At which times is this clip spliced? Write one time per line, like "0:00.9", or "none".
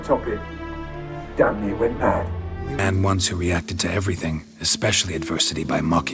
0:02.8